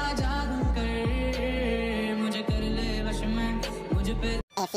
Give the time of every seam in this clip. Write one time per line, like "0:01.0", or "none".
none